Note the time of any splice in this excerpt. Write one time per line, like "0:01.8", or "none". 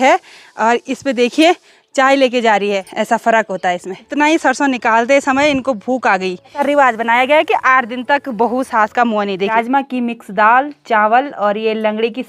0:02.9
0:04.0
0:06.6
0:09.5